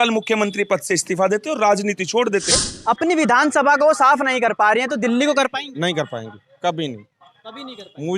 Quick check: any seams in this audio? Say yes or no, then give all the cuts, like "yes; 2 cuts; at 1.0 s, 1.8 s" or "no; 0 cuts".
yes; 1 cut; at 2.5 s